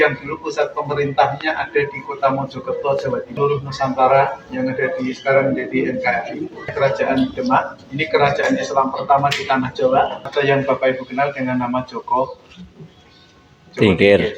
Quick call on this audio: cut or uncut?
cut